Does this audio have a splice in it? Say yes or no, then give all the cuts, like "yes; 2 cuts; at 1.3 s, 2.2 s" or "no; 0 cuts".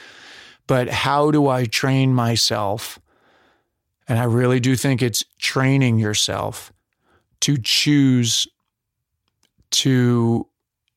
no; 0 cuts